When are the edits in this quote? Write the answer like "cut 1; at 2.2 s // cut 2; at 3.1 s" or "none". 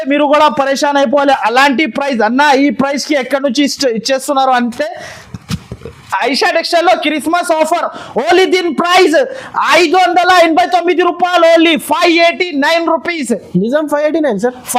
none

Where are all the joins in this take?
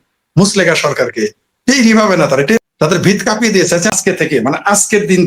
cut 1; at 2.6 s // cut 2; at 3.9 s

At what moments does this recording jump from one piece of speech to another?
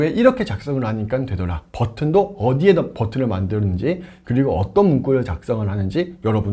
none

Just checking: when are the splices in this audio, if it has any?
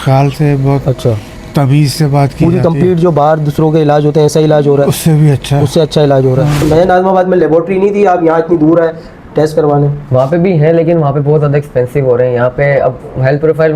cut 1; at 6.5 s

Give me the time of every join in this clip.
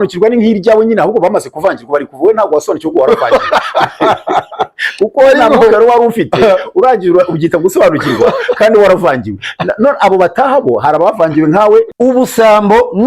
cut 1; at 11.9 s

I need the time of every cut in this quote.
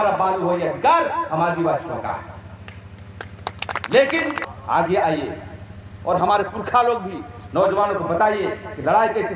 cut 1; at 4.5 s

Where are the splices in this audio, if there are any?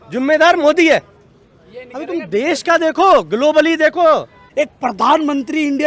cut 1; at 4.4 s

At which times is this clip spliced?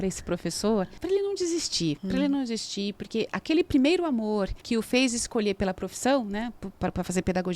cut 1; at 0.9 s // cut 2; at 2.0 s // cut 3; at 4.6 s

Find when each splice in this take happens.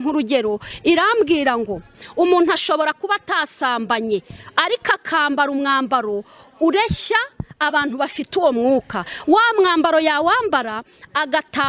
none

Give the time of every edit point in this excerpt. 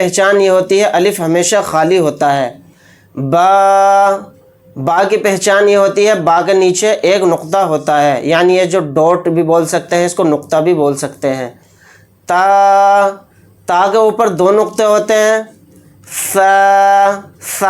none

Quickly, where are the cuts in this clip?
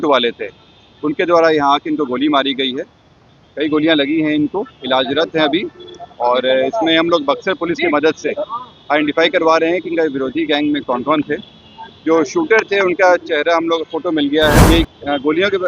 cut 1; at 14.6 s

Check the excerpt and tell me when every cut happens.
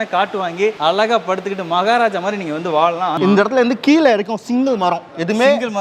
cut 1; at 0.8 s // cut 2; at 3.1 s

